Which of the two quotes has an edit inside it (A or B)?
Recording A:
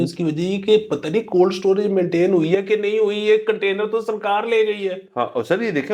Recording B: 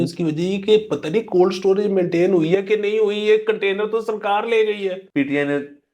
B